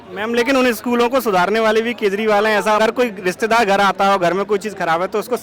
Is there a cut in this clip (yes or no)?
yes